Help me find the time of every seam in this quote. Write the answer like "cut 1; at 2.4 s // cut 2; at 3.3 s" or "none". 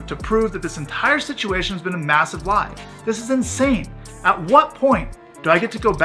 none